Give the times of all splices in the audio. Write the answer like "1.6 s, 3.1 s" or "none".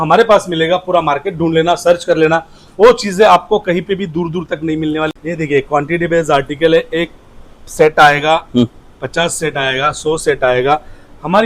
5.1 s